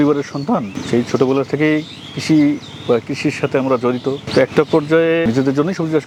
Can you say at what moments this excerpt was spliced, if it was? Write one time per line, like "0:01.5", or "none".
none